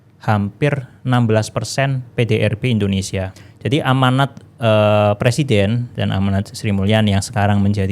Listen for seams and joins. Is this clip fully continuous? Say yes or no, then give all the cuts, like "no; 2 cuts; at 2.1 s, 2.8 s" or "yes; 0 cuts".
no; 1 cut; at 3.3 s